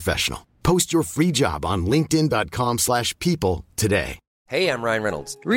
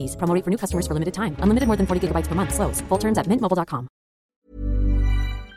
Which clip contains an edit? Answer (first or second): second